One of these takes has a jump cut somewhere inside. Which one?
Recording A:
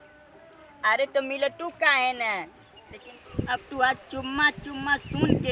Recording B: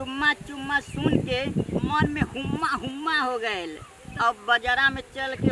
A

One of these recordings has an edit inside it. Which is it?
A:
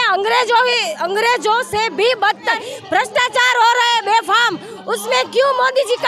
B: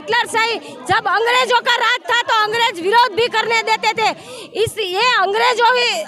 A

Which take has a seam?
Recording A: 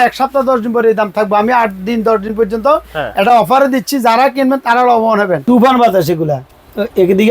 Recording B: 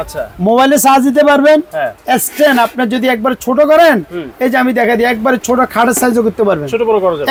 A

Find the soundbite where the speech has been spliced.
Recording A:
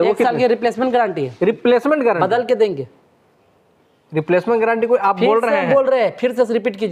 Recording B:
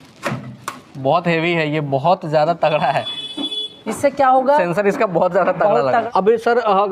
B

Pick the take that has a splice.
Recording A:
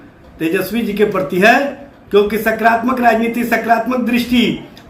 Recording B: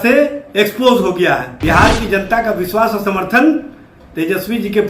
B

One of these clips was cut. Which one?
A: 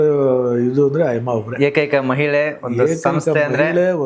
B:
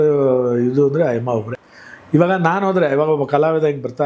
B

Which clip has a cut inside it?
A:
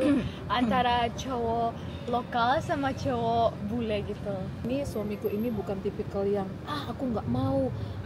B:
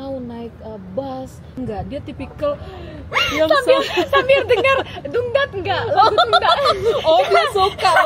A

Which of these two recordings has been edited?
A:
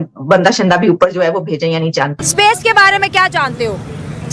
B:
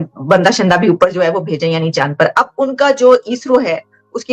A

